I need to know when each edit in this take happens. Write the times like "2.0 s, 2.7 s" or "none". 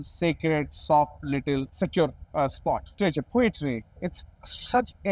1.7 s, 3.0 s